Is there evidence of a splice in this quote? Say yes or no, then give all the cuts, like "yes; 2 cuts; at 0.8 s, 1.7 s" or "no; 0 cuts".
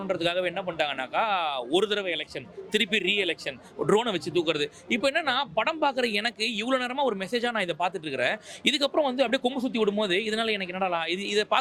no; 0 cuts